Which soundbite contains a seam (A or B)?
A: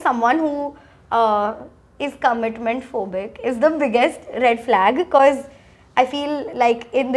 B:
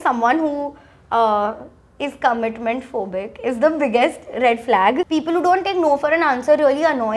B